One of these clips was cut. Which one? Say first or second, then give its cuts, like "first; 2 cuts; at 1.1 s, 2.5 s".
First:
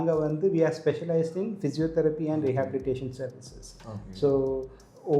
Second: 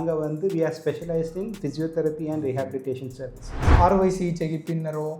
second; 1 cut; at 3.7 s